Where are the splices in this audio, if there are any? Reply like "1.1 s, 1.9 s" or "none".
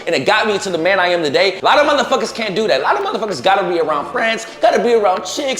1.6 s